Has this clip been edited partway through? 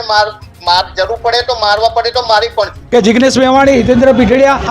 yes; 1 cut; at 2.8 s

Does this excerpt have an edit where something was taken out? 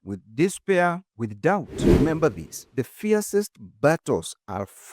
yes; 1 cut; at 1.8 s

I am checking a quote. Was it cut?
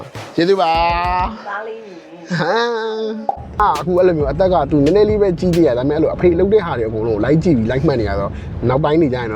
yes; 1 cut; at 3.6 s

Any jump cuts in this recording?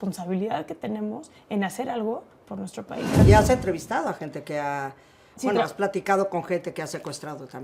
yes; 1 cut; at 3.2 s

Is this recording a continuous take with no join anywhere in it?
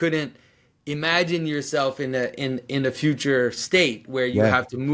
yes; 0 cuts

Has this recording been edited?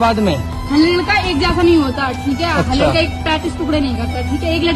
no; 0 cuts

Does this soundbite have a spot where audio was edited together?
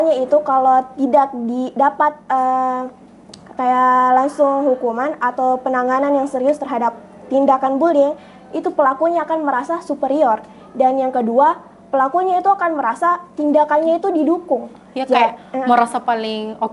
no; 0 cuts

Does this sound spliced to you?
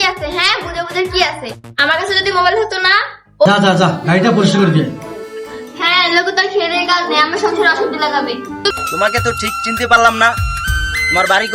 yes; 2 cuts; at 3.5 s, 8.7 s

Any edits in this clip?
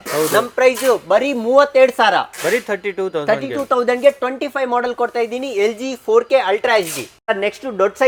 no; 0 cuts

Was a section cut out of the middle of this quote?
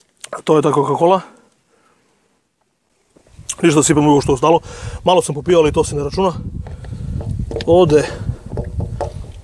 yes; 1 cut; at 3.0 s

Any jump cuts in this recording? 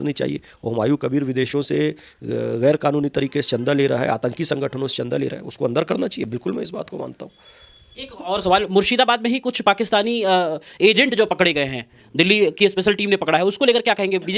no; 0 cuts

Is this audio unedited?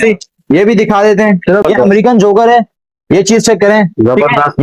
no; 1 cut; at 1.6 s

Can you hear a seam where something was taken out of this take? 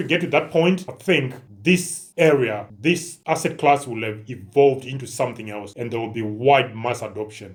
no; 0 cuts

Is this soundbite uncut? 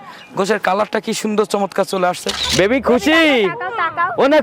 no; 1 cut; at 2.3 s

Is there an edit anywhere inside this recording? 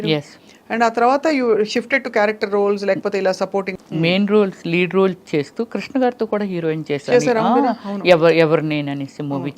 yes; 1 cut; at 3.7 s

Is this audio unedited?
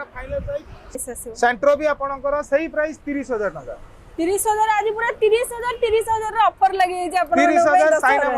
no; 1 cut; at 0.9 s

